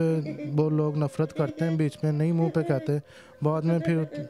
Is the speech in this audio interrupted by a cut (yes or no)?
no